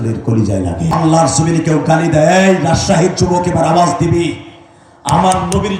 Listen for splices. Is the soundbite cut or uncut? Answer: cut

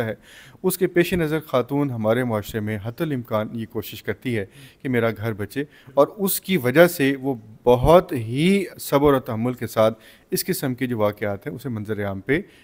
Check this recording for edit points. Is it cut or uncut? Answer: uncut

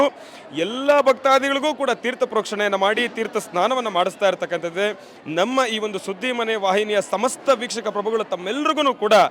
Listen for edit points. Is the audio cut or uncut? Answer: uncut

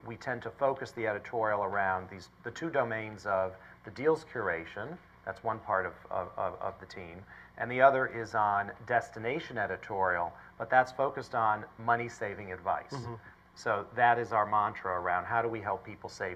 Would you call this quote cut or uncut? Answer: uncut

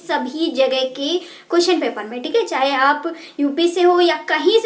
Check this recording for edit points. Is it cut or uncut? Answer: uncut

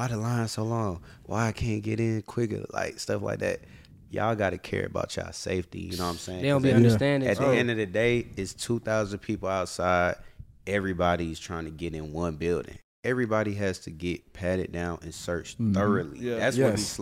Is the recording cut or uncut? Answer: cut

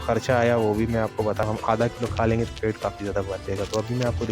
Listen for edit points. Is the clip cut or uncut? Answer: cut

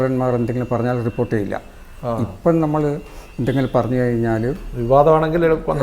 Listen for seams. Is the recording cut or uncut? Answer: uncut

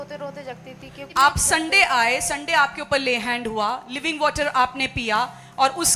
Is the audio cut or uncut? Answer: cut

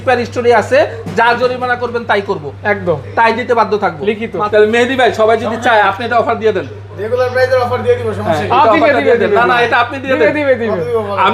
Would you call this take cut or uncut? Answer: cut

